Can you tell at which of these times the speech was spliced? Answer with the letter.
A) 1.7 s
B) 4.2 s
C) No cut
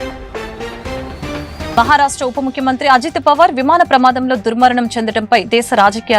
A